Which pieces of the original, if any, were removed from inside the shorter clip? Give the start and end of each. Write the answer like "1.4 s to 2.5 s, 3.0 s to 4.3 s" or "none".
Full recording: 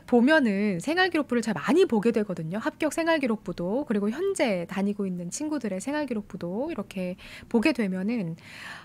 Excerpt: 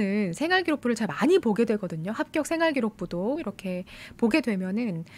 3.9 s to 6.7 s